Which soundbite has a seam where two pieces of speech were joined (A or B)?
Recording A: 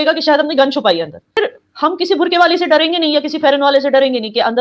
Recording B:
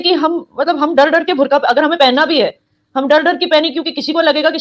A